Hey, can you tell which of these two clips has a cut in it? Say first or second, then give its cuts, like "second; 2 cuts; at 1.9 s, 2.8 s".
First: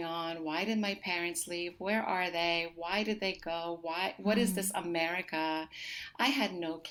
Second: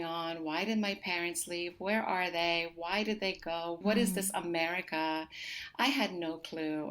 second; 1 cut; at 3.8 s